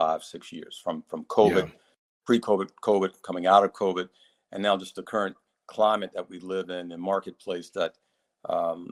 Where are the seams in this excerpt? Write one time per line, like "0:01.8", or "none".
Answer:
none